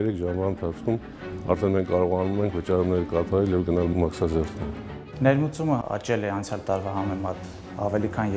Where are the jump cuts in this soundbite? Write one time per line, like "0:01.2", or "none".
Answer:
0:03.9
0:05.1